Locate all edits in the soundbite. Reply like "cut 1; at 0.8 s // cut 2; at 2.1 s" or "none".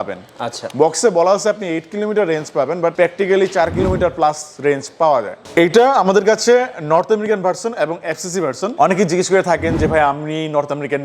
cut 1; at 2.9 s // cut 2; at 5.4 s // cut 3; at 8.7 s